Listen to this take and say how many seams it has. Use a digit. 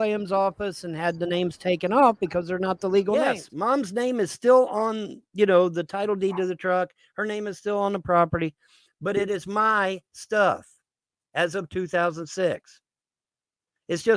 1